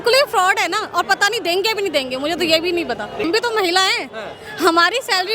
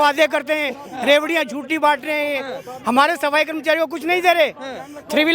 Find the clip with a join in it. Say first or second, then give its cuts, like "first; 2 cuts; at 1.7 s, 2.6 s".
first; 1 cut; at 3.3 s